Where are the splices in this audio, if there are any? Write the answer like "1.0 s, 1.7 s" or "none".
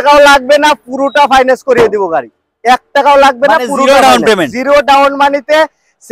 none